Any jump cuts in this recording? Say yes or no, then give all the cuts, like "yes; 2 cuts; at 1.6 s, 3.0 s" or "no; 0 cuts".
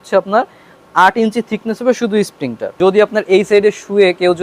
yes; 1 cut; at 2.7 s